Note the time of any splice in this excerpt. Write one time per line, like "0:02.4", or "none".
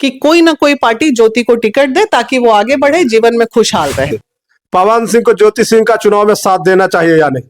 0:04.0